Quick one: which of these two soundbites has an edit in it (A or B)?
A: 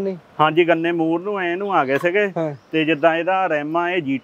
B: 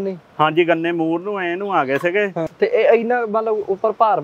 B